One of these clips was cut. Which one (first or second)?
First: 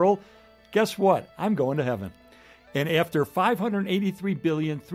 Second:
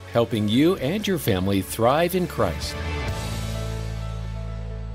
second